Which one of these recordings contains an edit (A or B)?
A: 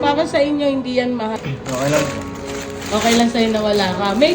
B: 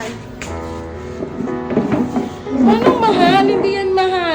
A